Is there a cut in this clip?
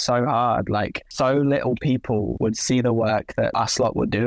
yes; 3 cuts; at 1.0 s, 2.3 s, 3.5 s

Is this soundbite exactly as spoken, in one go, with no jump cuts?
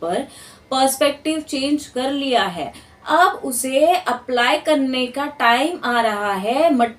yes; 0 cuts

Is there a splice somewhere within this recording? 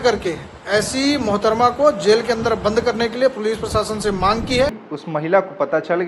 no; 0 cuts

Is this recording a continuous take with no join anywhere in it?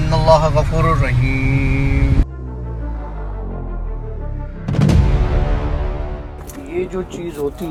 yes; 0 cuts

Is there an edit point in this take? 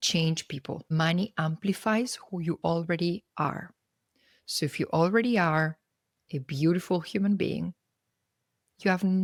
no; 0 cuts

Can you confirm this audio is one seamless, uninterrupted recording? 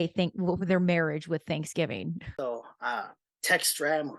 no; 1 cut; at 2.3 s

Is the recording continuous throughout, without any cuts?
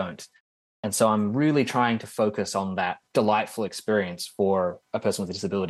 no; 1 cut; at 3.0 s

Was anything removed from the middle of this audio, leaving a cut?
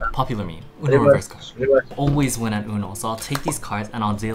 yes; 1 cut; at 1.9 s

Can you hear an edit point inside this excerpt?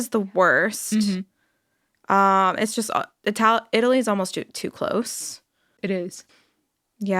yes; 1 cut; at 6.3 s

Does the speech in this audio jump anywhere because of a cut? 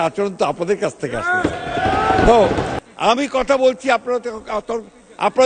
yes; 1 cut; at 2.7 s

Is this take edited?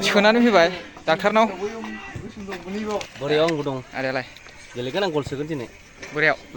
yes; 1 cut; at 3.1 s

